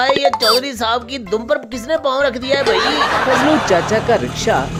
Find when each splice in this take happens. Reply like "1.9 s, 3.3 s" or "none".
none